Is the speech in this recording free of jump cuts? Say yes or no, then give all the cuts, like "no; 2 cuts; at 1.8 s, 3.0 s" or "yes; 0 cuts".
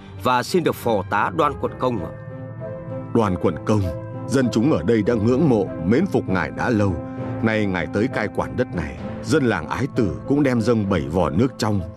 yes; 0 cuts